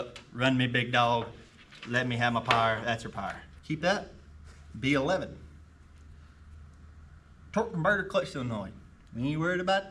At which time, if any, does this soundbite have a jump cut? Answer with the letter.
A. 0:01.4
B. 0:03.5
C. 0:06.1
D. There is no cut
B